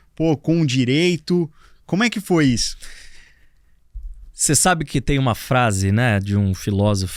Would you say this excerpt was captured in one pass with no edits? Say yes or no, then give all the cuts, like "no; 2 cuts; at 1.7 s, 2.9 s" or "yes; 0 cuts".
yes; 0 cuts